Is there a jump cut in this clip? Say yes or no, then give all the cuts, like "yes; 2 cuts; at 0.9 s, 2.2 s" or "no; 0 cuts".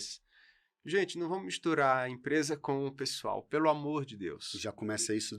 no; 0 cuts